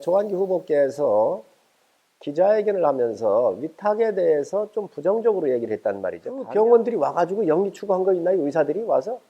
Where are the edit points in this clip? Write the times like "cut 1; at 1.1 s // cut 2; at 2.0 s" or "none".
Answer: cut 1; at 6.4 s